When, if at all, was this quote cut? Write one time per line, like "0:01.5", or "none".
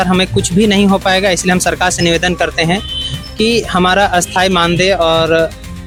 none

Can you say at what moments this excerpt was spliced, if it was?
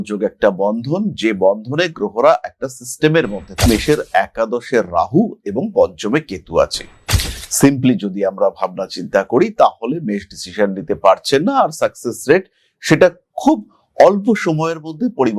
0:03.6

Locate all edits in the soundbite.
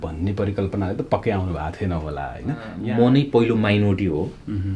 0:02.7

